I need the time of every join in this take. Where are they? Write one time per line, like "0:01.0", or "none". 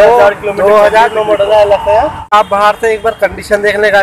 0:02.3